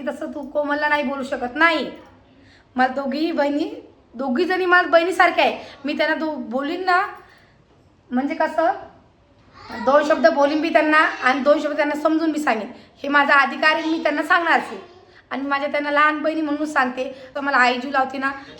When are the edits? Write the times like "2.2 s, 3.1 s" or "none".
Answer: 17.3 s

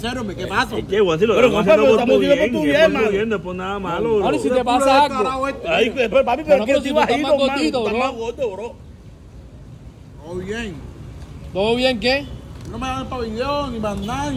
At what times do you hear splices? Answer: none

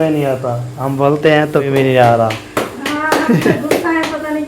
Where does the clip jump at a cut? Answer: 1.7 s

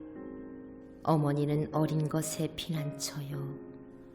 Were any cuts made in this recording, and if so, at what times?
0.9 s

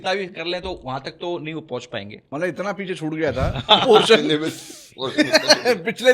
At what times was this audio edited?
2.2 s

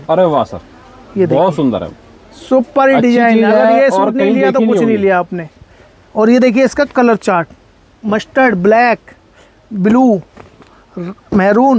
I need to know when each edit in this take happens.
none

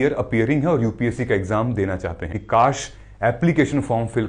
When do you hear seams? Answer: 2.4 s

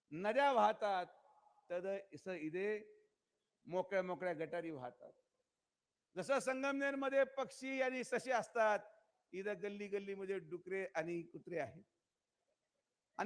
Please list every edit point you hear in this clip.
none

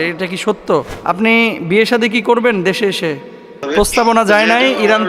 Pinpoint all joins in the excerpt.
0.9 s, 3.7 s

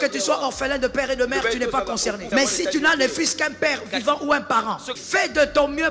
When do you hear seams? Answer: 2.2 s, 4.9 s

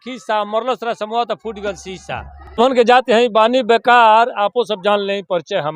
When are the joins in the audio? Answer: 2.6 s

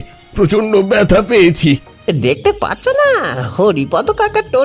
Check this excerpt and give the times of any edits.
1.9 s

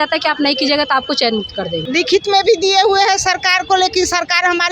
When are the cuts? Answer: 1.8 s

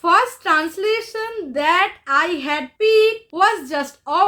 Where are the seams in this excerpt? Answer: 2.7 s, 3.2 s

